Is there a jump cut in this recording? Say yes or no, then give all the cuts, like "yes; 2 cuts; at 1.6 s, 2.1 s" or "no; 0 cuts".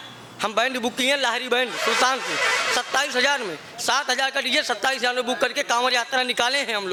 no; 0 cuts